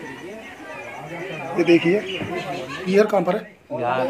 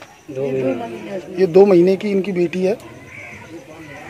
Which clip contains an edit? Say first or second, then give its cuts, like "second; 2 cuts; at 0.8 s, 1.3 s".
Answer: first; 1 cut; at 2.8 s